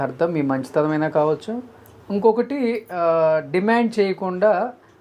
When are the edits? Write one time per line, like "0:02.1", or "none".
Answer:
none

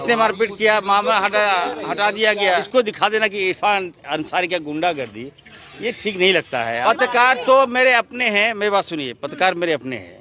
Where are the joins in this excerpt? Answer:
0:02.7
0:06.8

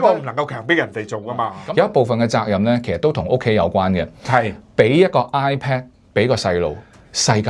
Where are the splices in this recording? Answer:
0:01.6

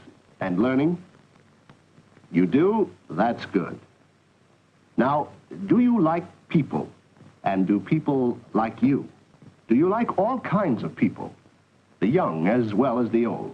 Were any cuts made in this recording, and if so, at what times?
0:05.1

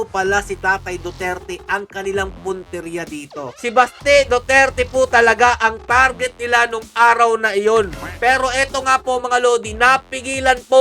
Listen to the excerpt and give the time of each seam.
0:03.6

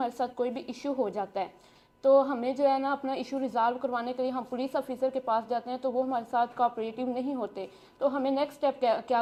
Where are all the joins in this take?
none

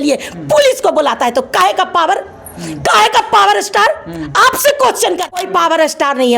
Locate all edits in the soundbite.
0:05.4

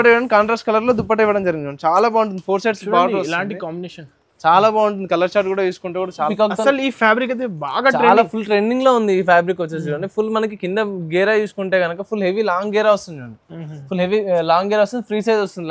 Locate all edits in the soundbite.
0:06.3

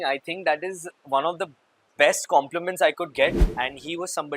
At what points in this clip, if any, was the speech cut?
0:03.4

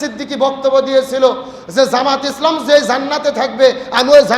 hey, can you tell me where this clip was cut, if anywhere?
none

